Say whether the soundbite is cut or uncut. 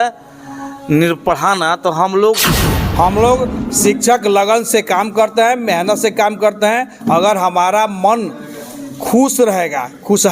cut